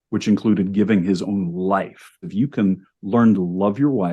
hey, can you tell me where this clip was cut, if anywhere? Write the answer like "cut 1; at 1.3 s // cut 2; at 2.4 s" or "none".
cut 1; at 2.3 s